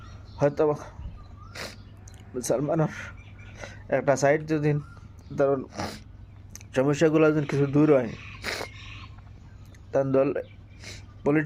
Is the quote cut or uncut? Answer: cut